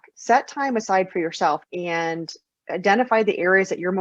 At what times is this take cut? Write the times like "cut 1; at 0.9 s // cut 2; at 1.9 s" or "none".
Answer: cut 1; at 1.6 s